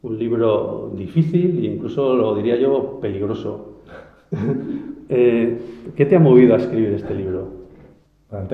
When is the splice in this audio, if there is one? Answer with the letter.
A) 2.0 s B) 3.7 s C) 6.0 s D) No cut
A